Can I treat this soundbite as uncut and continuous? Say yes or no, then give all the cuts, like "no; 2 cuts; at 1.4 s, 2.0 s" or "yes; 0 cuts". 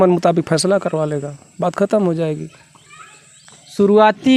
yes; 0 cuts